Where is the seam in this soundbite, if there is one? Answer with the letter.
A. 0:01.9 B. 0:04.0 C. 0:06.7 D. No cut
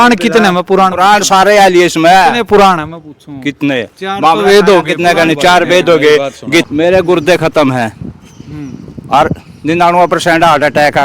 C